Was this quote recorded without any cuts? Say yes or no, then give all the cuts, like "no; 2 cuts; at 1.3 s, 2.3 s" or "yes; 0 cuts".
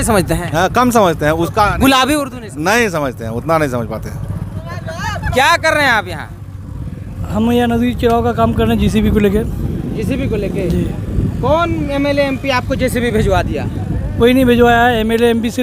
yes; 0 cuts